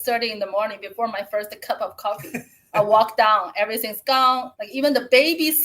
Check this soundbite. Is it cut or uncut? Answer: cut